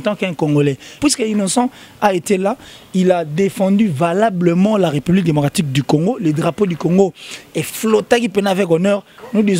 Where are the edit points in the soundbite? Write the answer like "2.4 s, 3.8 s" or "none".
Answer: 1.0 s